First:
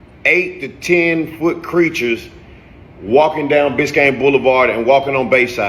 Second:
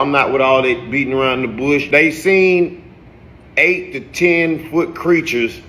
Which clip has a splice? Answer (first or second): first